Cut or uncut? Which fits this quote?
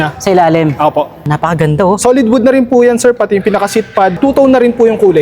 cut